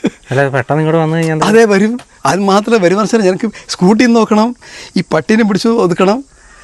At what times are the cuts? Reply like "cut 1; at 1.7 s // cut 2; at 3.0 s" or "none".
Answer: none